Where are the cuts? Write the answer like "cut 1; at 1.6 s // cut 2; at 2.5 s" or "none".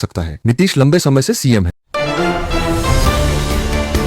cut 1; at 1.8 s

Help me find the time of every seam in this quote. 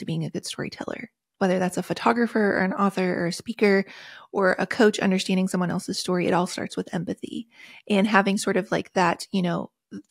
none

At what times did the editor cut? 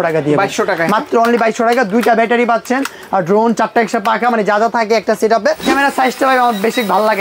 cut 1; at 5.7 s

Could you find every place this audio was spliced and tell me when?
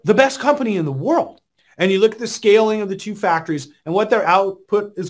cut 1; at 1.4 s

